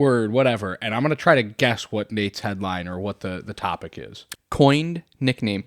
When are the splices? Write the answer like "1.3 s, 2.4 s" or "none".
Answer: 4.2 s